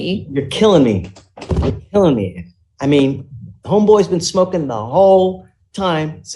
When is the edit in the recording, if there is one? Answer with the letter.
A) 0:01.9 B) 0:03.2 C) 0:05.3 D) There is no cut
D